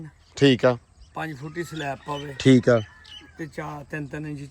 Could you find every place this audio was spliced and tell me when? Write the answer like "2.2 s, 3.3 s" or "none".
none